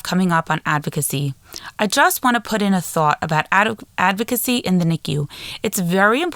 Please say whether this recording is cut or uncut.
uncut